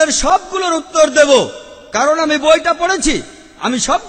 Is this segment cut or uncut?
uncut